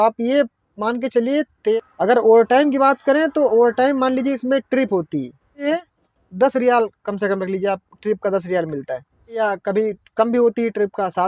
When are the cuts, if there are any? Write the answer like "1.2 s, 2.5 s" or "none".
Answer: 1.8 s, 5.6 s, 9.4 s

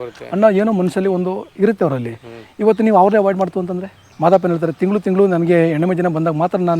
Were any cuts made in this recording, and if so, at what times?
4.1 s

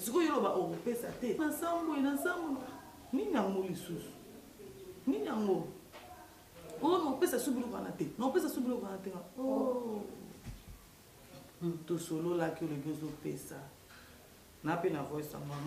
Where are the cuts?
1.4 s

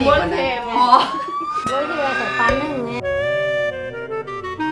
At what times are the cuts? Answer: none

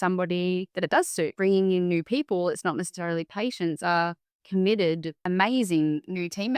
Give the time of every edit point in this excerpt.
1.3 s, 5.1 s

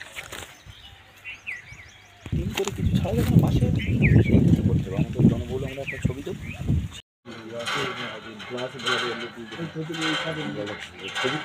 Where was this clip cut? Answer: 7.3 s

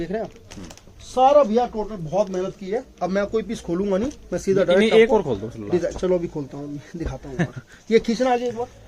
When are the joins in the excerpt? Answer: none

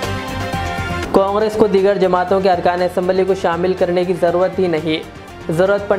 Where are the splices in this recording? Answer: 0.9 s

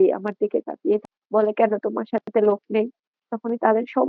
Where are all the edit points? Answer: 1.2 s

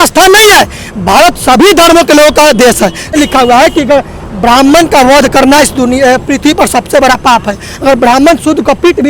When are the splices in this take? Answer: 3.1 s

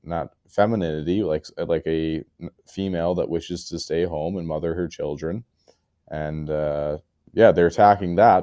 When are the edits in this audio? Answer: 7.1 s

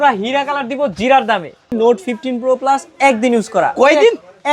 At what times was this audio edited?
1.7 s

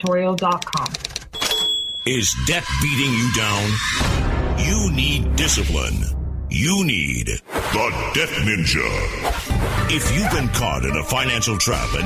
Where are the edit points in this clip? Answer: 1.9 s

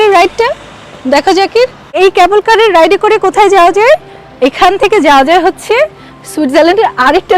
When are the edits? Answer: 1.9 s

